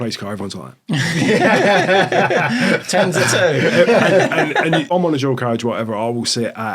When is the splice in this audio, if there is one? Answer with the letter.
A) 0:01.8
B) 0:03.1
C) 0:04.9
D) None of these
C